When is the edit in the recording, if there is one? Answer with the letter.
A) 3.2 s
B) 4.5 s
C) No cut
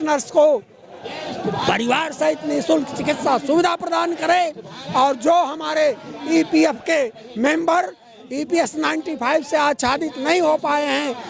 C